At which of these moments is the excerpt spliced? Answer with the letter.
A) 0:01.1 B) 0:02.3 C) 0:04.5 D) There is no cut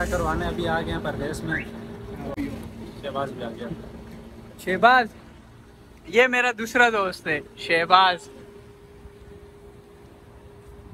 B